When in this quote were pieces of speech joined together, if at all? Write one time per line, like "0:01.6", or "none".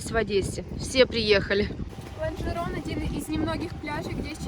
0:01.9